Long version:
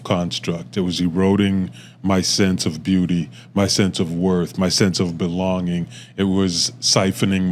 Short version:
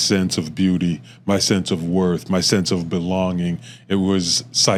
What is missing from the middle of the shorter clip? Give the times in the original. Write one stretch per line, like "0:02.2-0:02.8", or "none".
none

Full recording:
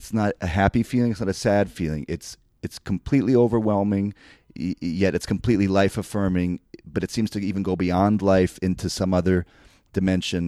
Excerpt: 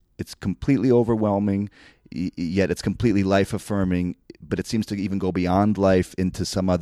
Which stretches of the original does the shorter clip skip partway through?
none

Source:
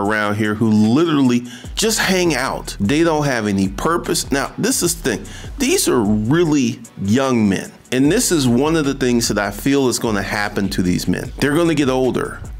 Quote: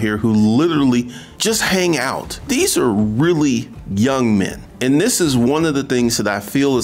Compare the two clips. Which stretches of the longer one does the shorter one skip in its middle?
0:02.6-0:05.4

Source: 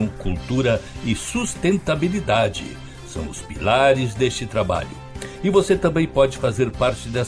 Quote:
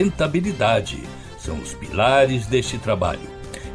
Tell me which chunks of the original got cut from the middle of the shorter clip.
none

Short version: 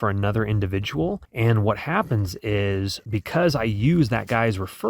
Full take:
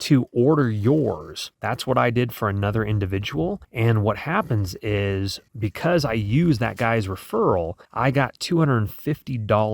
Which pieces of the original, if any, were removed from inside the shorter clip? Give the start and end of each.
0:05.4-0:05.5

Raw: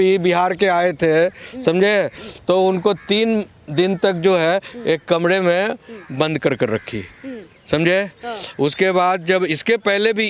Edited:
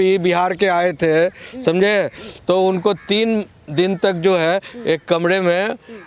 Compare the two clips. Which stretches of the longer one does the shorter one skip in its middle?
none

